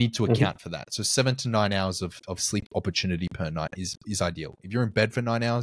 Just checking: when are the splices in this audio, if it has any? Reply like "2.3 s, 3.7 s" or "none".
none